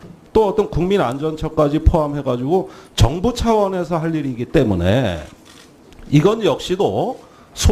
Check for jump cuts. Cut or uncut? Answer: uncut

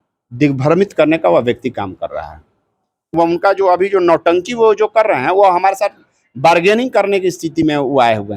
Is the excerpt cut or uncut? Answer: cut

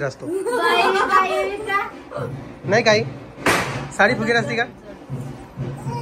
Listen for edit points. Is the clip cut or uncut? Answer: uncut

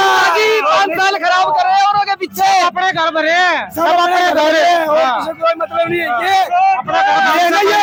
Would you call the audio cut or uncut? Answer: uncut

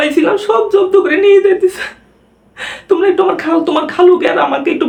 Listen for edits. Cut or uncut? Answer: uncut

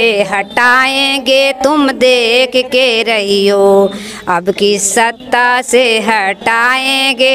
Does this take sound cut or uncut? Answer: uncut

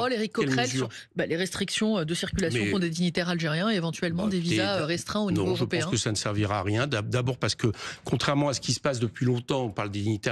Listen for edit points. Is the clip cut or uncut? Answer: uncut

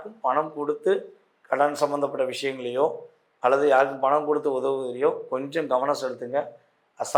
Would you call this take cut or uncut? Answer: uncut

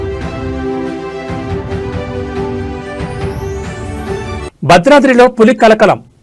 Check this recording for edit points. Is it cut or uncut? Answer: uncut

